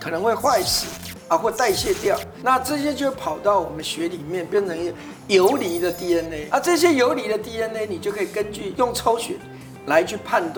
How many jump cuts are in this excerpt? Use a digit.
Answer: 0